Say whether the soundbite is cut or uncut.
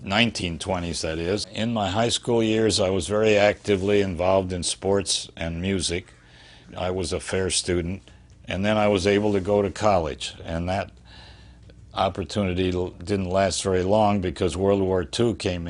cut